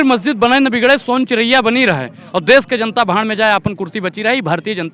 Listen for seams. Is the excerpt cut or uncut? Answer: uncut